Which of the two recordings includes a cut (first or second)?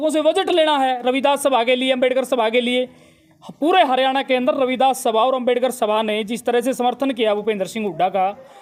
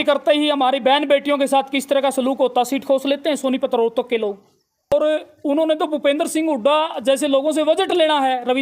second